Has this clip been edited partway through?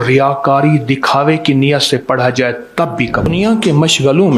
yes; 1 cut; at 3.3 s

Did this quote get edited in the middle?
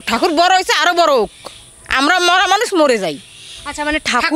no; 0 cuts

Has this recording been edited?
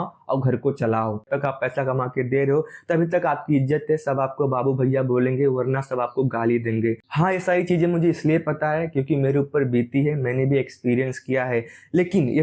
yes; 2 cuts; at 1.2 s, 7.1 s

